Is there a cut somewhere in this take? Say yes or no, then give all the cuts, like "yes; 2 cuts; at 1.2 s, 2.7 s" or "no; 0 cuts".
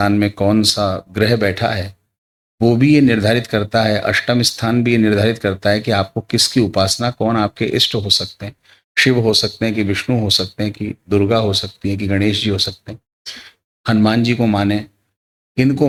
no; 0 cuts